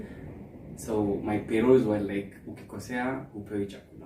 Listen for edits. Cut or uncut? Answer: uncut